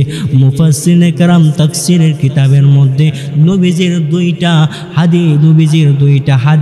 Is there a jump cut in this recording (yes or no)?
no